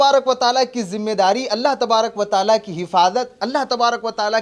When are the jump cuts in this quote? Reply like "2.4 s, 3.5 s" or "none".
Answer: none